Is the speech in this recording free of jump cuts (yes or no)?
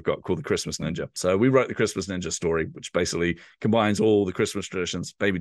no